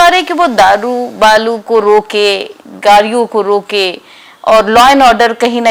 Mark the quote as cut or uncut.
uncut